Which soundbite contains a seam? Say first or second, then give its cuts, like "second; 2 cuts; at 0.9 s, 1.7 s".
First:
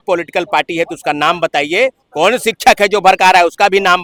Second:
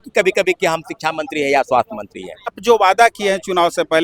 second; 1 cut; at 2.6 s